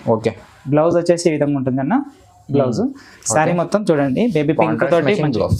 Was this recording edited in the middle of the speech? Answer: no; 0 cuts

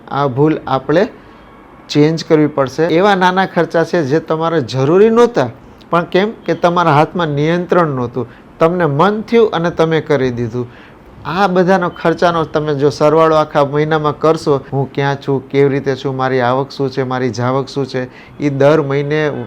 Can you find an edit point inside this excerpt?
yes; 2 cuts; at 2.9 s, 14.7 s

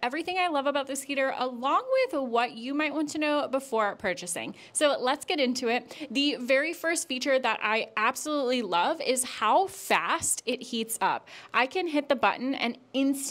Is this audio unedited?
yes; 0 cuts

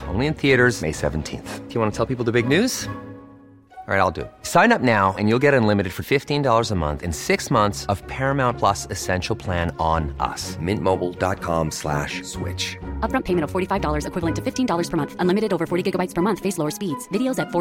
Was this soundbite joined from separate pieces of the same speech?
no; 0 cuts

